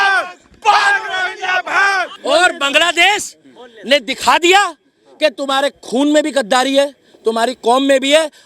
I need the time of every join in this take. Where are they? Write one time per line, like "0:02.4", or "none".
0:02.1